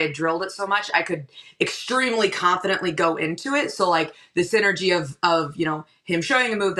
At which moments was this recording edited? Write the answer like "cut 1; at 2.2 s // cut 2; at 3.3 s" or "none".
none